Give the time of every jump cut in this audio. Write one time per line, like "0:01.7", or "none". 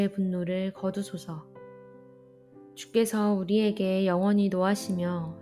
0:01.5
0:02.9